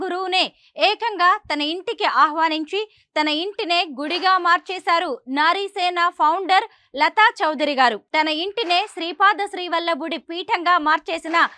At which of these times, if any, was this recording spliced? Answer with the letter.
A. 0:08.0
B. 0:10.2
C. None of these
A